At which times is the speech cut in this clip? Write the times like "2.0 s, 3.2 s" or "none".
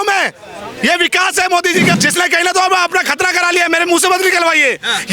1.9 s